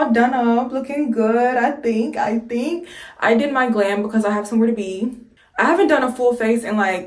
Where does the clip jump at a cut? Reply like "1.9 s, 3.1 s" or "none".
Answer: none